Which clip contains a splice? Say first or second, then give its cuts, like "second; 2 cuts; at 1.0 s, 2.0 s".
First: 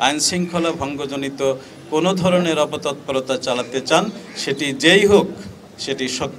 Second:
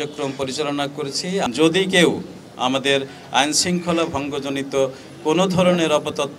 second; 1 cut; at 1.5 s